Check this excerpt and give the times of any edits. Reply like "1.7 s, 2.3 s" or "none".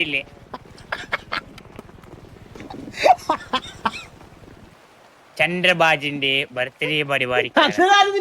4.6 s